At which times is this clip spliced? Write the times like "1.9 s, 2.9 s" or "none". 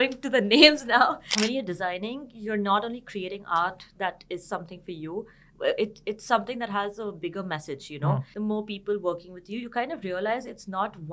1.2 s, 8.3 s